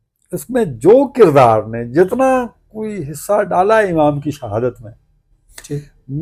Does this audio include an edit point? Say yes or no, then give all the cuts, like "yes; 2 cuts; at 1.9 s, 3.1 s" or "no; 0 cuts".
no; 0 cuts